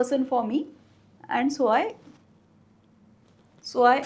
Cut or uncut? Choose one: uncut